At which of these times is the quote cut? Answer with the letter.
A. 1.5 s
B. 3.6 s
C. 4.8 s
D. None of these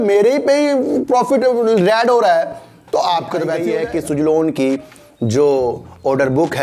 B